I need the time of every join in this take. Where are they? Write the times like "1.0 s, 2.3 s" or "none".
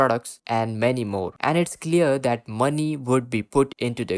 1.3 s

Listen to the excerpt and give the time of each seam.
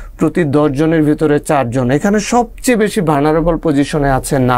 none

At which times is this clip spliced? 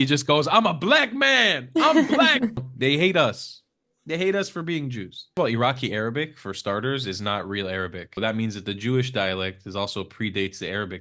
2.6 s, 5.3 s, 8.2 s

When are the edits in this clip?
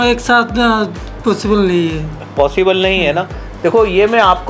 none

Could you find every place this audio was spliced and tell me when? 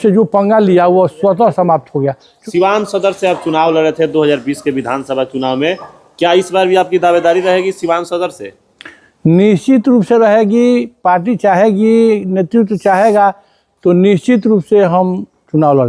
2.3 s

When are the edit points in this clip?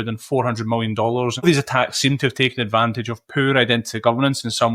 1.4 s

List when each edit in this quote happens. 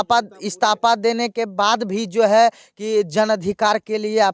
none

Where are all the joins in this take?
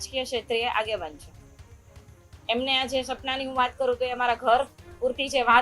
none

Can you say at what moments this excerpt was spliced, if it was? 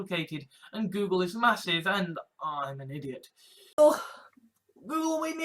3.8 s

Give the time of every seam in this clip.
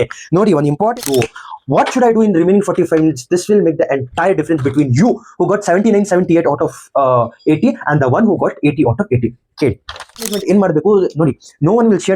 1.0 s, 10.3 s

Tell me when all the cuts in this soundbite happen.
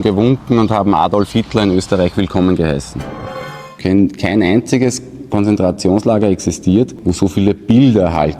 3.3 s, 7.0 s

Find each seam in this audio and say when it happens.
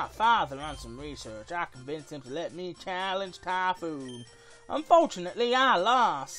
1.4 s

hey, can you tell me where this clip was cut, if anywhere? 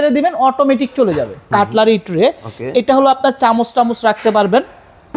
1.5 s

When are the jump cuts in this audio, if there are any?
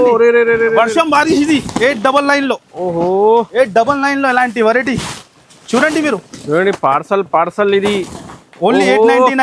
none

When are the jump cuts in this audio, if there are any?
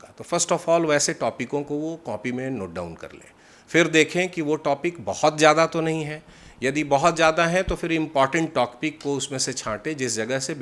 none

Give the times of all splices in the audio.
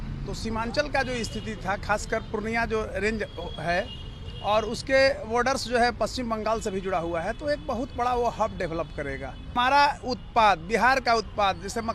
9.5 s

